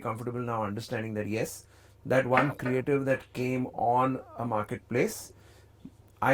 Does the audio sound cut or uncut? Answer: uncut